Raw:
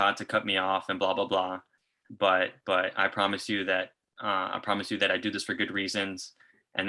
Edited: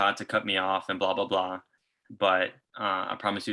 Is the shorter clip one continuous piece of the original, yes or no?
no